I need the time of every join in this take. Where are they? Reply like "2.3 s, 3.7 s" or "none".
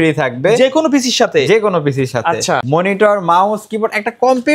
2.6 s

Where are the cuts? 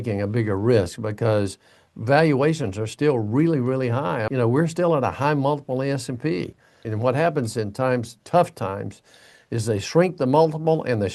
4.2 s, 6.8 s

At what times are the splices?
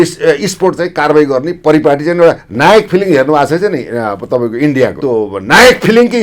5.0 s

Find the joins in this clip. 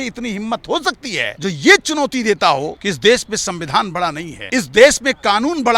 1.3 s, 2.8 s, 4.3 s

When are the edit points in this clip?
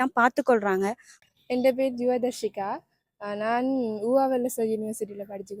1.1 s

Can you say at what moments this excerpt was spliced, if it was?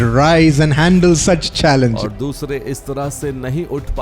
2.0 s

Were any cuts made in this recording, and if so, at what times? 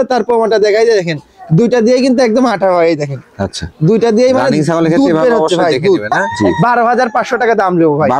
6.2 s

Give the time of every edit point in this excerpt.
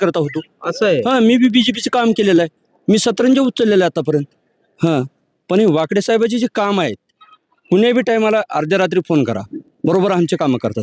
none

